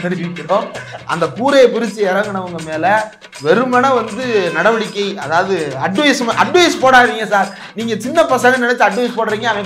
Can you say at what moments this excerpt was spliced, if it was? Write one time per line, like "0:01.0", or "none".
none